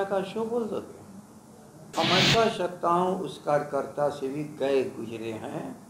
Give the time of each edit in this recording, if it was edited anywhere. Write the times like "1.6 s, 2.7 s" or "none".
none